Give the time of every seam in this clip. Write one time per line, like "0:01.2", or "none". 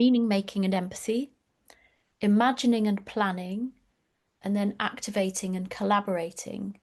none